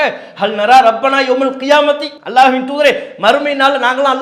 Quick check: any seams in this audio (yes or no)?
yes